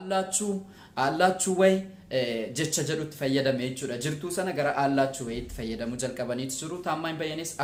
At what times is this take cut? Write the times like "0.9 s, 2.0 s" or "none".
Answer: none